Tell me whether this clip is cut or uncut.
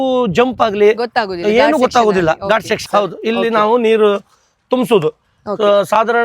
cut